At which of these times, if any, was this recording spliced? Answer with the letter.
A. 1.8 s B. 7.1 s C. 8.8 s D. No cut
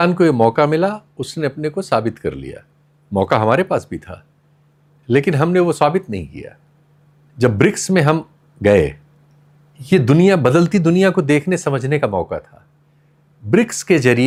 D